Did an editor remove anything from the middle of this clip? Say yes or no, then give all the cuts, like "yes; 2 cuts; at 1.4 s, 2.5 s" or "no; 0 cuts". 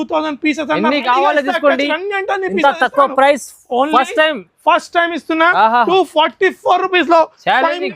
no; 0 cuts